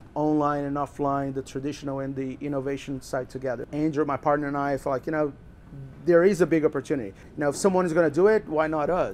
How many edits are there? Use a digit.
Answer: 2